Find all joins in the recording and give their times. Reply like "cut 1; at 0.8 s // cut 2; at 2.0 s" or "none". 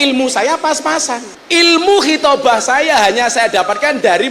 cut 1; at 1.3 s